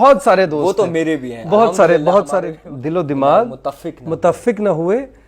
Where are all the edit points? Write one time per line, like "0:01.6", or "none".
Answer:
0:02.6